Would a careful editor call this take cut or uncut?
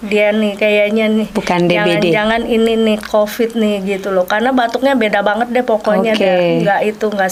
uncut